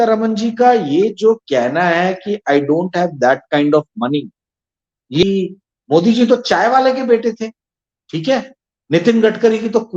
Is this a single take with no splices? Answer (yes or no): no